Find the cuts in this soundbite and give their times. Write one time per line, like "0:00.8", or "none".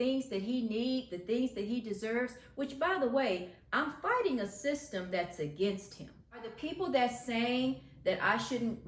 0:06.5

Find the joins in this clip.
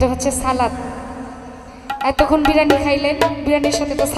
none

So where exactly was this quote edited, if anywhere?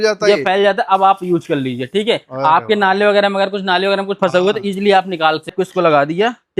0:05.5

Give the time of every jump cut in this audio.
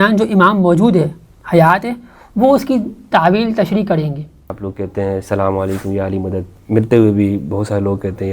0:04.5

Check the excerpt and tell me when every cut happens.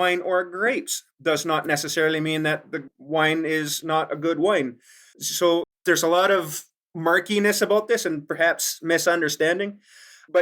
none

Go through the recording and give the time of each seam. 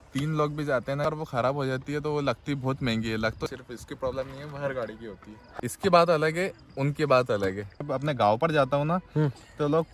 0:01.0
0:03.4
0:05.3
0:07.8

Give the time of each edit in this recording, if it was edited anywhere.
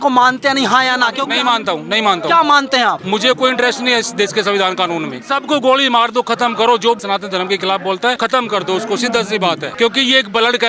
0:01.2
0:03.0
0:05.2
0:07.0
0:08.2
0:09.7

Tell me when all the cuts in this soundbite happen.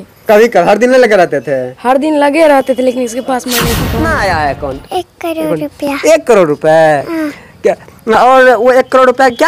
0:03.9

